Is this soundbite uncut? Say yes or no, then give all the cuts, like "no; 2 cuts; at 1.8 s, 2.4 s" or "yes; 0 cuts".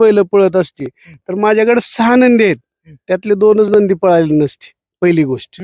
yes; 0 cuts